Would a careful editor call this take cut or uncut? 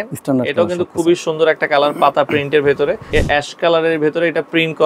cut